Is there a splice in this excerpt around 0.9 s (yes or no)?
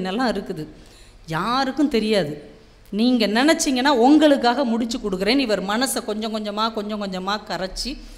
no